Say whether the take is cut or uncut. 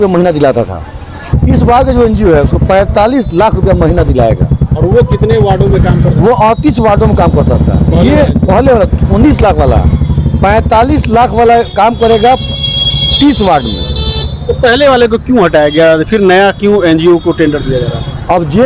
uncut